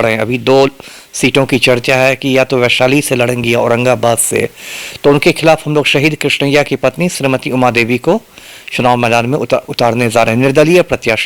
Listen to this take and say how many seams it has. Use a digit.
0